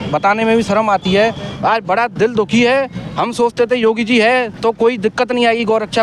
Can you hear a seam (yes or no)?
yes